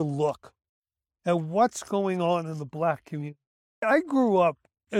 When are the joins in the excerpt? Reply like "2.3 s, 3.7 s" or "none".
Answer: 3.7 s